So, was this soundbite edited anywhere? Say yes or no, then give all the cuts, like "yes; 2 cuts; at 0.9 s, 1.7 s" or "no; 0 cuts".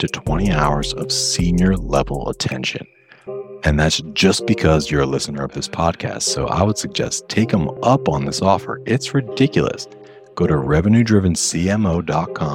no; 0 cuts